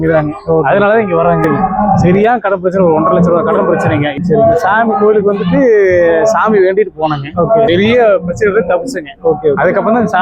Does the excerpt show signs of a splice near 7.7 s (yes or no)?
yes